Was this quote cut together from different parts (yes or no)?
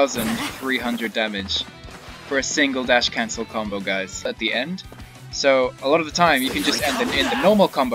yes